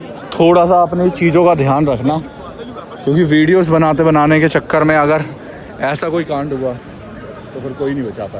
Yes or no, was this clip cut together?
no